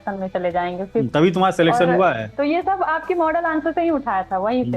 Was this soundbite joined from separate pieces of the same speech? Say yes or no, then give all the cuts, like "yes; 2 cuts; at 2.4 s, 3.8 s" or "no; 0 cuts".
yes; 2 cuts; at 1.1 s, 2.3 s